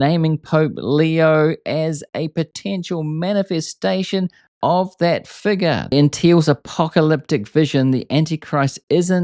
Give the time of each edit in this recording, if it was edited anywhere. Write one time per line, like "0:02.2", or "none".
0:05.9